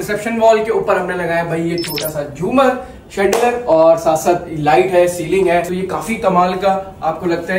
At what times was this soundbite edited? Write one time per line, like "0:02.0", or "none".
none